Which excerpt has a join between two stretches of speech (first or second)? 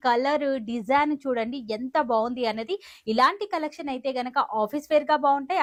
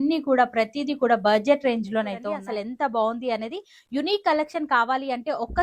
second